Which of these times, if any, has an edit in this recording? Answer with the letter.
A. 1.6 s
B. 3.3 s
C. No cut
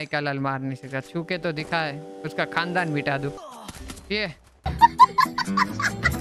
B